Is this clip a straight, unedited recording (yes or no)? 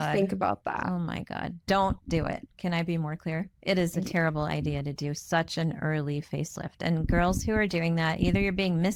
yes